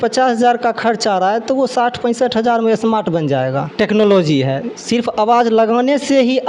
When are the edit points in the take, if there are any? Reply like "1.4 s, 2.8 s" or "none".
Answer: 3.7 s